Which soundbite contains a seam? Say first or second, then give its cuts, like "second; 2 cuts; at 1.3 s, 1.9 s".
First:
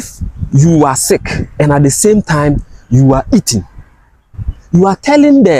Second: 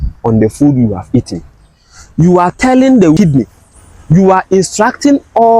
second; 1 cut; at 3.2 s